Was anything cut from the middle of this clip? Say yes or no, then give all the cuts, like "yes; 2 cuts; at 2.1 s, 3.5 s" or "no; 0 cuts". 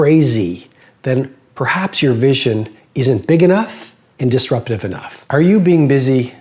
yes; 1 cut; at 5.1 s